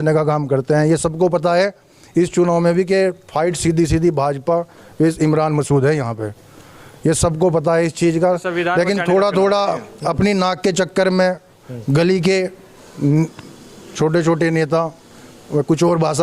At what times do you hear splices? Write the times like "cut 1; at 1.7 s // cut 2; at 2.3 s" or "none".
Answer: none